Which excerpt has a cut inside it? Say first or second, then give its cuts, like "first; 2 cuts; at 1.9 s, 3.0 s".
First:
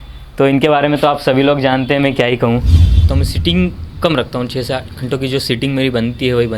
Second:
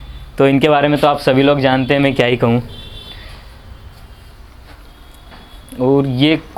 first; 1 cut; at 3.1 s